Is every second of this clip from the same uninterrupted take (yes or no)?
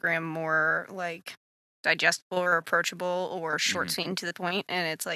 yes